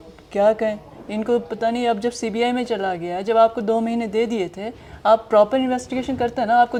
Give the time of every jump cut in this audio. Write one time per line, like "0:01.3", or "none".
none